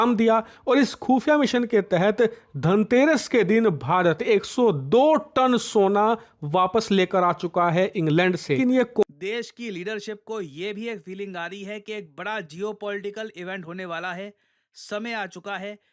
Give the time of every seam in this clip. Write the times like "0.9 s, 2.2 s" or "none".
9.0 s